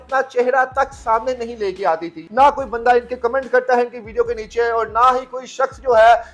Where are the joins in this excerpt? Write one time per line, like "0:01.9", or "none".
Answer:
0:02.2